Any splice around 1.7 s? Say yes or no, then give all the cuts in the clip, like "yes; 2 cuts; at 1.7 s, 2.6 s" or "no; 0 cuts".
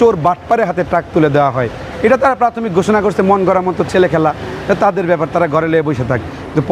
no; 0 cuts